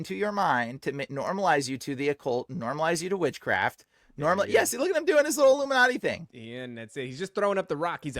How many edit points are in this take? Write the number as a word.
zero